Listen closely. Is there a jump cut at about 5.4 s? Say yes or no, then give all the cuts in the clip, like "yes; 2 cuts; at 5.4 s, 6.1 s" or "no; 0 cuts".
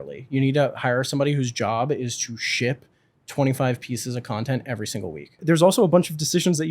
yes; 1 cut; at 5.4 s